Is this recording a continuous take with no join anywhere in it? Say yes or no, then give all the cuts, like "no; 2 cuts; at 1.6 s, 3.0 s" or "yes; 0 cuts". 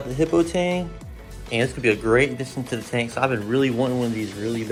yes; 0 cuts